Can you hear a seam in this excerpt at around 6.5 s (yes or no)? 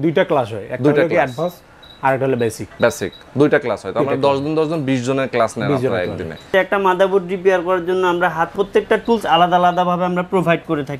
yes